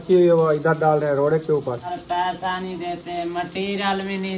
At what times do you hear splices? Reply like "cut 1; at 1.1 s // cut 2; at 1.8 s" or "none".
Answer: cut 1; at 1.9 s